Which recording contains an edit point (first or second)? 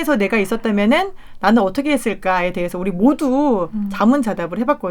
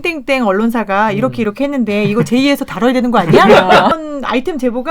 second